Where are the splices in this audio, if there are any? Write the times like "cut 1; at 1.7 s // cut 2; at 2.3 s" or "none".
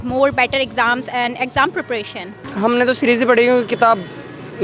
cut 1; at 2.5 s